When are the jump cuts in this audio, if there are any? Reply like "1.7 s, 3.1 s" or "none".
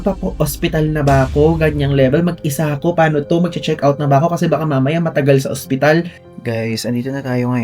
6.2 s